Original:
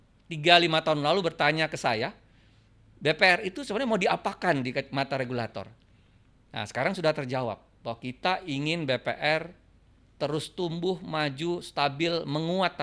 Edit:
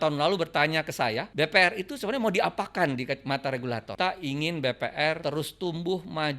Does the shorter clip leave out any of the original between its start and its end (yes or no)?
yes